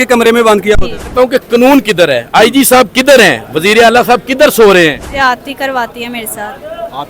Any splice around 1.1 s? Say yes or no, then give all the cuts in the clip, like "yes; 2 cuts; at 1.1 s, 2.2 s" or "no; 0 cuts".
yes; 2 cuts; at 1.1 s, 5.1 s